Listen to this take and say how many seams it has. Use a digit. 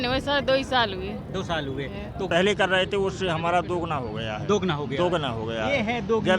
1